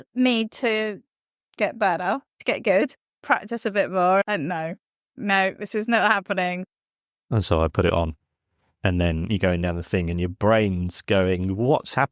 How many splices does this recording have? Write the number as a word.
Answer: four